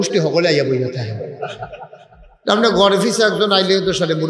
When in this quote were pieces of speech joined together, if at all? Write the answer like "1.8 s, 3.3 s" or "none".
none